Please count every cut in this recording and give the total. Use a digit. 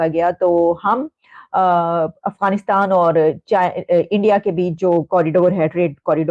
0